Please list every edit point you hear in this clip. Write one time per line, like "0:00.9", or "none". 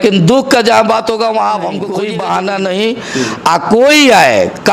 0:01.8